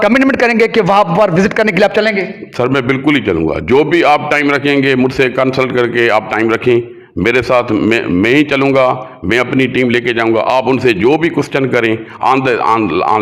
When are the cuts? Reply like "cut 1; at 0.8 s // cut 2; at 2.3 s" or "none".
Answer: none